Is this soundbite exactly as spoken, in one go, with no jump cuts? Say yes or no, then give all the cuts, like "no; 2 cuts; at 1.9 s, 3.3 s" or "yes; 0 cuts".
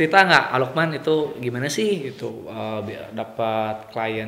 yes; 0 cuts